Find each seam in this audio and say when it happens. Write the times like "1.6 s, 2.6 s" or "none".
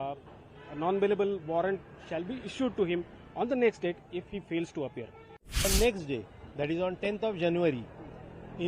5.6 s